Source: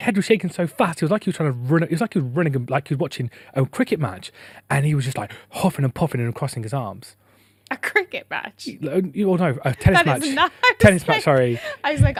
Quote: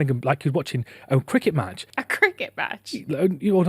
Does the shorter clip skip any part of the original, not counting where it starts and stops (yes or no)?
yes